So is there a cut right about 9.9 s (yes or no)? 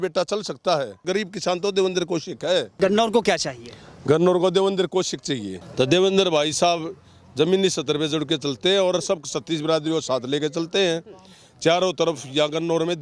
no